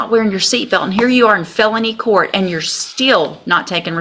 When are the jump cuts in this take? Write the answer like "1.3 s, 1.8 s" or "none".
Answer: none